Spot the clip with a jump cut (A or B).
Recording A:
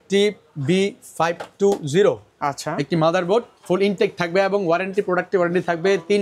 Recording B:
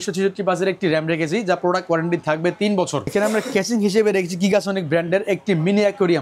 B